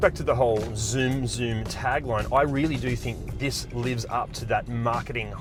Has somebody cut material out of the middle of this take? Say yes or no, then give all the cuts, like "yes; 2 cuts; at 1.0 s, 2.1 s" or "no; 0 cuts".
no; 0 cuts